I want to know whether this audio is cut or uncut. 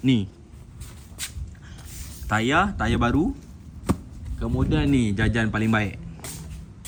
uncut